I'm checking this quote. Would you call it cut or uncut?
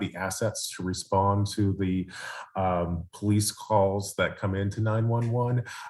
uncut